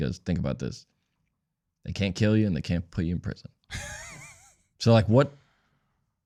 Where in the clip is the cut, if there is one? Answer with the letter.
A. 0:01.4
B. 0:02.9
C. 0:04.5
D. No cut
D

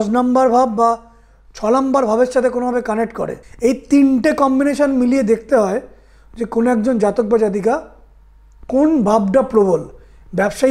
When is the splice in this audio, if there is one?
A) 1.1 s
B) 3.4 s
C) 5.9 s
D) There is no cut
B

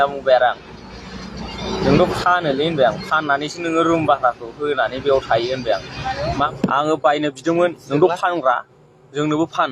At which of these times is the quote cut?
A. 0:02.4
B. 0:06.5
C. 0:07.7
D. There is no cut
B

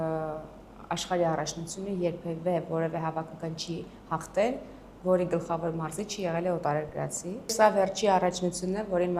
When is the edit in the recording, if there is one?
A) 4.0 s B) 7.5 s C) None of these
B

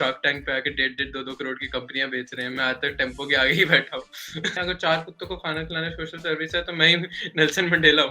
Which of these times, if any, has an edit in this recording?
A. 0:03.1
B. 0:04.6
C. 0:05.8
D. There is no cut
B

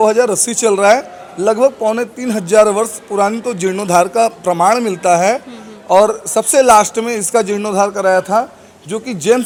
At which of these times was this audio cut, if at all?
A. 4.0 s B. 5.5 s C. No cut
C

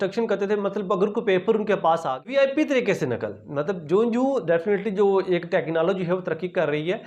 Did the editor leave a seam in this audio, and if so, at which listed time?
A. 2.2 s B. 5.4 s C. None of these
A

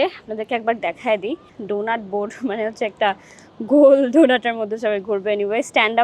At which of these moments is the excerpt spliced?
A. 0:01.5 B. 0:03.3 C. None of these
A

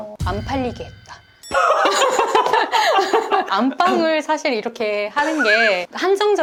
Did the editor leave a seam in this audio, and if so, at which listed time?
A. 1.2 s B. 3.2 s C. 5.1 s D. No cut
D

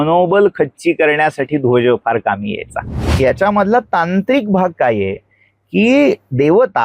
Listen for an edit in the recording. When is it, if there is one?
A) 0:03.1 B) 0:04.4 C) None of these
A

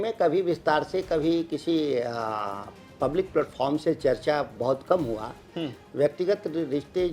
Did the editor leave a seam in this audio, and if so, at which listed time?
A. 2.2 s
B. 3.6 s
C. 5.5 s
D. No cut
D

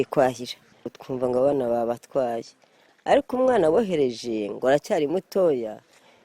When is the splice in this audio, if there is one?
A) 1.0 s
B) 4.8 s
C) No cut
A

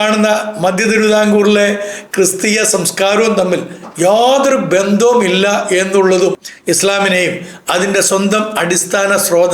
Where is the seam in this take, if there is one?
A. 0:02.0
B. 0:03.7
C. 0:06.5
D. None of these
C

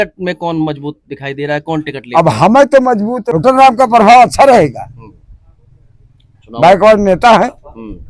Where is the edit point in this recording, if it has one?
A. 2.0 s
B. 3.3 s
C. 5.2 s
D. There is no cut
B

